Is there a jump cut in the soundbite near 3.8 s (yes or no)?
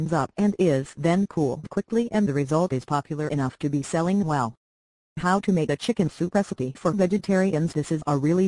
yes